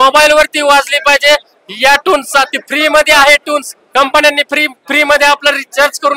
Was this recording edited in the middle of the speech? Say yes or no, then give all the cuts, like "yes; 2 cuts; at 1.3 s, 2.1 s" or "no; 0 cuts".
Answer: no; 0 cuts